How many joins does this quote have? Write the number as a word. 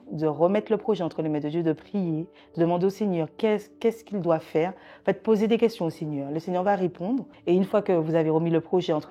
one